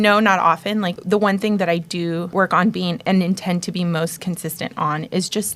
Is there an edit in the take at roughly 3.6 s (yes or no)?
no